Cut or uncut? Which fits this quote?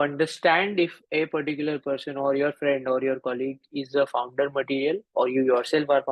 uncut